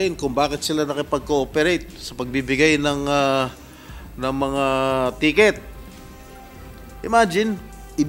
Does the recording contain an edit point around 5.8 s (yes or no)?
yes